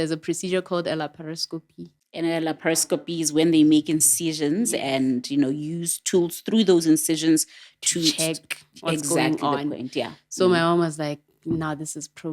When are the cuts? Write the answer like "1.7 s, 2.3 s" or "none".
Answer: 1.8 s